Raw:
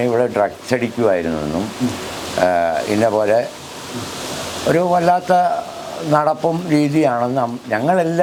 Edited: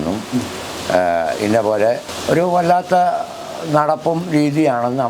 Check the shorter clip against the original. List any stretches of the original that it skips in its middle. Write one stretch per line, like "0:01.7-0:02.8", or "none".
0:03.6-0:04.5